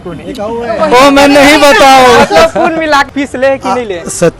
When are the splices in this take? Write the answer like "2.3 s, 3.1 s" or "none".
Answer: 3.1 s